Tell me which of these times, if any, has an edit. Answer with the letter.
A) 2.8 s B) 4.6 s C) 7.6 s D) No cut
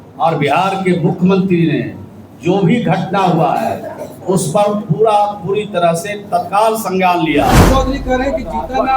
C